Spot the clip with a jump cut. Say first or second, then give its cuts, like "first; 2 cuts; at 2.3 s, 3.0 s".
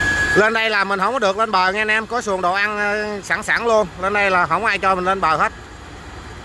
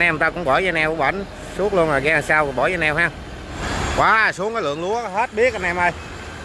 second; 1 cut; at 3.6 s